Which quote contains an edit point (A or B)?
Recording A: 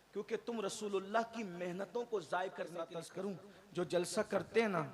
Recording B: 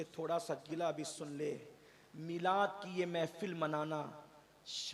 A